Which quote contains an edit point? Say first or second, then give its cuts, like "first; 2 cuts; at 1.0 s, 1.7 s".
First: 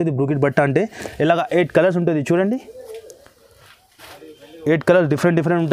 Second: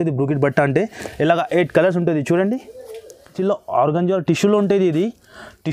second; 1 cut; at 3.4 s